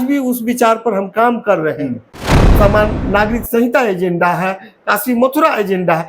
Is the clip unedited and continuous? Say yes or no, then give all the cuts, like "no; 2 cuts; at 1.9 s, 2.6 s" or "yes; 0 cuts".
no; 1 cut; at 2.3 s